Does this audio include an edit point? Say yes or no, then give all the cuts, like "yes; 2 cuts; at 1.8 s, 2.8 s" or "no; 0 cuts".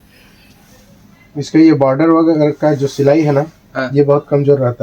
no; 0 cuts